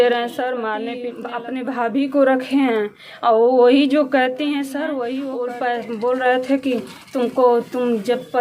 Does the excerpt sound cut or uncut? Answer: cut